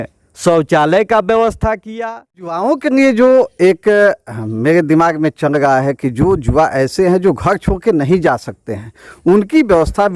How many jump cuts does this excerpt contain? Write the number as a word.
one